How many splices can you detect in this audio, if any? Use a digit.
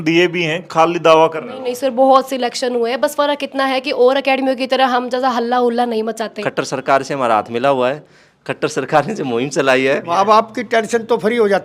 2